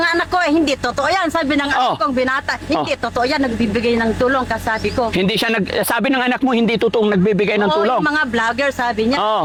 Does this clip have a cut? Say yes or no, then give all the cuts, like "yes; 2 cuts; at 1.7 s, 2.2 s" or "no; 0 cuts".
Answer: no; 0 cuts